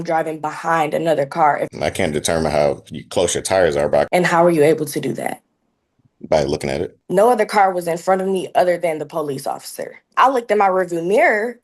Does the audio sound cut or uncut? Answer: cut